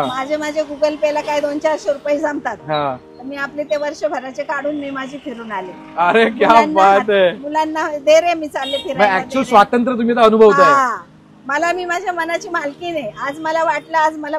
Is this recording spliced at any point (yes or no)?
no